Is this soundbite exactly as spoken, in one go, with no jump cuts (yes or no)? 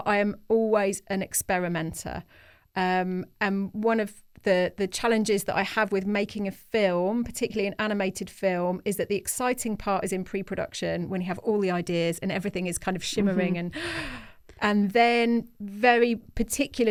yes